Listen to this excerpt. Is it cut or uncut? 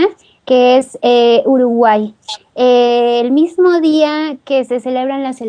cut